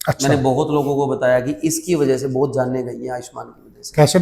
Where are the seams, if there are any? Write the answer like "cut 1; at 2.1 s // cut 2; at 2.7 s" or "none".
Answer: none